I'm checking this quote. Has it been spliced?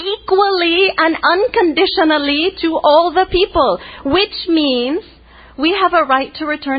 yes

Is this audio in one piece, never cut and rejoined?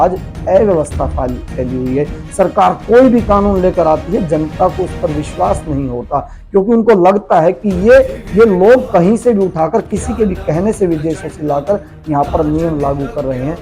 yes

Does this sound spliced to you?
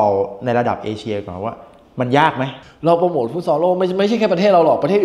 yes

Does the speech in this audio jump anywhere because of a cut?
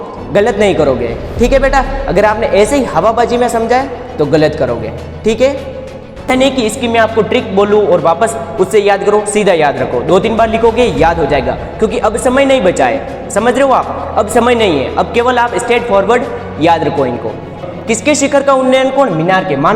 yes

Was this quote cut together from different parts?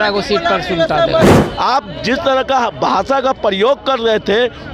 yes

